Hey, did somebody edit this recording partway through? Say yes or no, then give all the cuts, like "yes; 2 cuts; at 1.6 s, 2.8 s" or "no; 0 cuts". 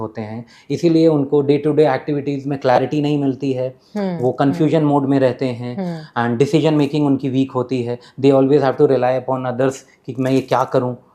no; 0 cuts